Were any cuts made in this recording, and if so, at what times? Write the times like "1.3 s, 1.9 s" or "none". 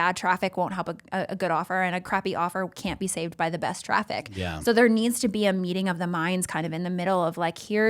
2.0 s